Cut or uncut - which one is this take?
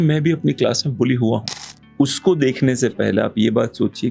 cut